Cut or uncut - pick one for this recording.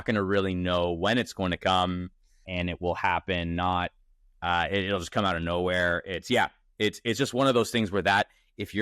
cut